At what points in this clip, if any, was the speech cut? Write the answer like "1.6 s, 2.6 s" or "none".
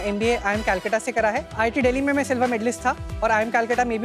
1.6 s, 3.1 s